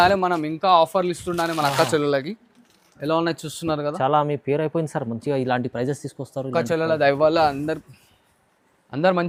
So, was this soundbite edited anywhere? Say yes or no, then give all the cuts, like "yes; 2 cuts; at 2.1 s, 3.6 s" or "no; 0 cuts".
no; 0 cuts